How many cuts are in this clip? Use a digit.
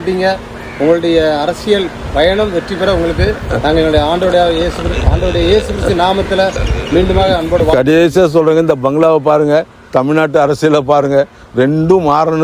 0